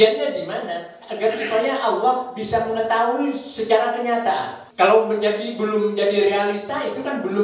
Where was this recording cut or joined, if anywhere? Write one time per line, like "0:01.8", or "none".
0:04.6